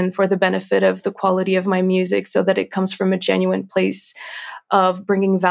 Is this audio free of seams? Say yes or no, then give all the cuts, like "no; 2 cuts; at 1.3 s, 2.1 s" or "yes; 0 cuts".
yes; 0 cuts